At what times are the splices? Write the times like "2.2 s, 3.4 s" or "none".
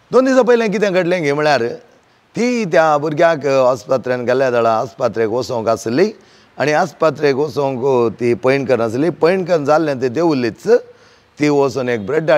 none